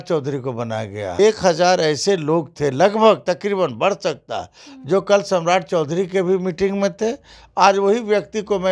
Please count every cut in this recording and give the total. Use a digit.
1